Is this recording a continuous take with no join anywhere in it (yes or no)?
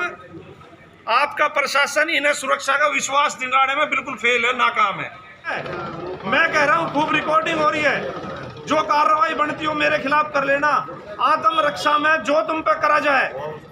no